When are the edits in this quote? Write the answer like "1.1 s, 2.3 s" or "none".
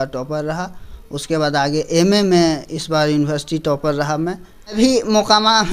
4.8 s